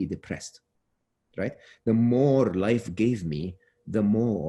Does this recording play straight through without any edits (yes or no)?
yes